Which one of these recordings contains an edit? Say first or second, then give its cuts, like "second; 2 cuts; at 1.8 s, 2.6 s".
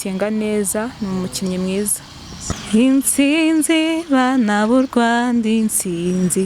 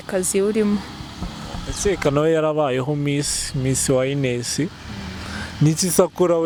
first; 1 cut; at 2.4 s